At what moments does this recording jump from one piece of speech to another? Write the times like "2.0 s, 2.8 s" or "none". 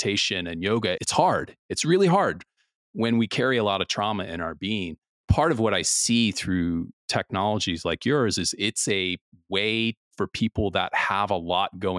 1.0 s, 5.2 s, 10.0 s